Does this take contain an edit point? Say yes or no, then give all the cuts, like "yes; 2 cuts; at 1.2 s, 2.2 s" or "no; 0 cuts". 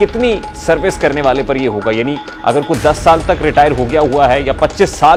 no; 0 cuts